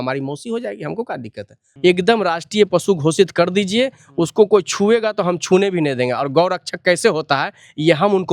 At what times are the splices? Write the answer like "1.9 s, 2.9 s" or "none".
1.6 s